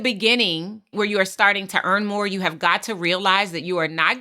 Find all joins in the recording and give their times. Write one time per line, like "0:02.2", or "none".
0:00.9